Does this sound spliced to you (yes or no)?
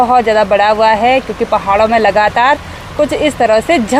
no